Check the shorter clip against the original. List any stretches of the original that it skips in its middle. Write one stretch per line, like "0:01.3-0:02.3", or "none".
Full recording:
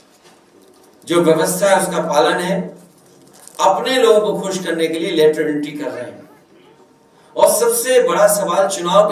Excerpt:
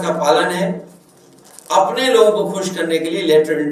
none